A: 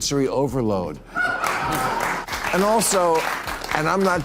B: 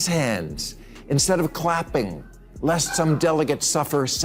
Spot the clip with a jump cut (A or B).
A